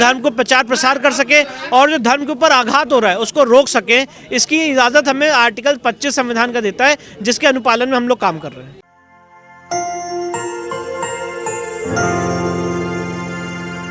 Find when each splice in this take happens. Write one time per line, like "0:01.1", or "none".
none

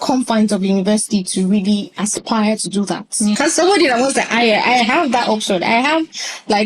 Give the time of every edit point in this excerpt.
0:03.3

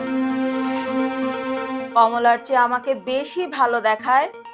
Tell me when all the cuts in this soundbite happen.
0:01.8

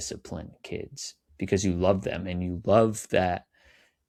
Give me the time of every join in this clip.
none

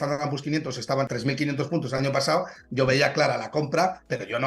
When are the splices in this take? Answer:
0:01.1

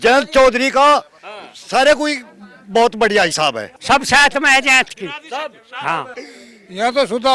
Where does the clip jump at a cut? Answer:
0:03.7
0:06.2

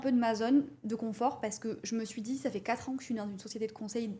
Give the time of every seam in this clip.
none

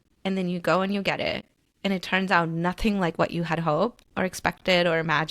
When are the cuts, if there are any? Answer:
0:04.0

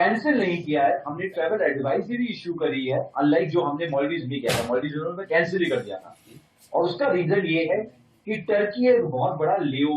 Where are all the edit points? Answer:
none

